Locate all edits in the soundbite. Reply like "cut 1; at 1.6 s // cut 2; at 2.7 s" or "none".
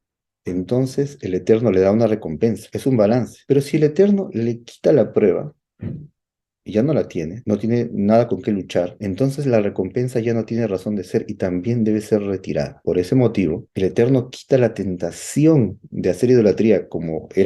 cut 1; at 2.7 s // cut 2; at 3.3 s // cut 3; at 7.4 s // cut 4; at 9.0 s // cut 5; at 12.7 s // cut 6; at 13.7 s